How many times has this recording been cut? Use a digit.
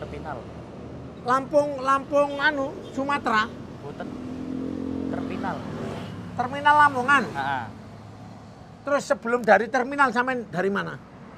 0